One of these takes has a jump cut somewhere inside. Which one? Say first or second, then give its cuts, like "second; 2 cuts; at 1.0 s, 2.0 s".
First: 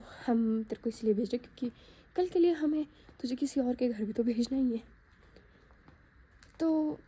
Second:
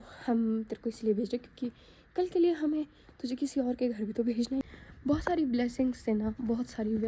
second; 1 cut; at 4.6 s